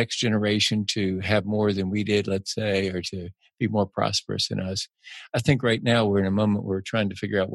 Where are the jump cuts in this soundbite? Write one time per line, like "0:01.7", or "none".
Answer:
none